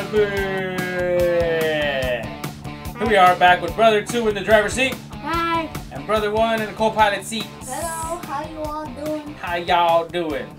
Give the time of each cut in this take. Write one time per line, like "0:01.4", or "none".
0:01.4